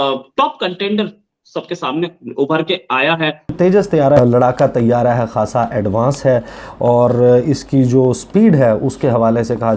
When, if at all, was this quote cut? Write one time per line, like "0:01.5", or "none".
0:03.5
0:04.2